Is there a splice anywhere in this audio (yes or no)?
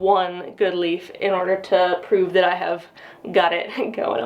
no